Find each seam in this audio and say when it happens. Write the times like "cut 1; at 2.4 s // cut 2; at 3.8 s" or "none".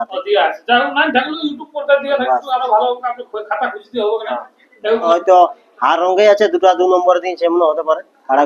cut 1; at 5.1 s